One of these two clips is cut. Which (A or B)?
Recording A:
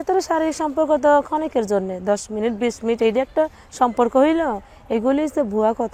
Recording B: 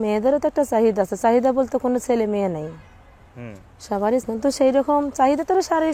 B